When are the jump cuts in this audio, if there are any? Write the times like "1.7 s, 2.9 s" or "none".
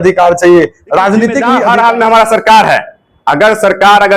1.5 s